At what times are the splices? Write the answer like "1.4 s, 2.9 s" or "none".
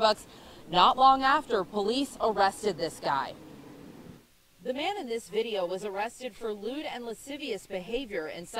none